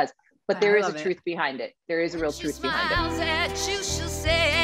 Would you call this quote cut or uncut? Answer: cut